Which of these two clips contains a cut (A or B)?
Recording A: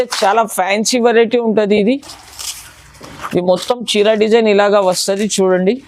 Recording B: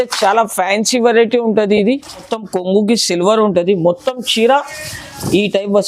B